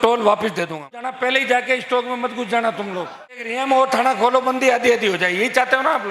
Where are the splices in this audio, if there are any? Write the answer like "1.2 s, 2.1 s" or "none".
1.2 s, 3.4 s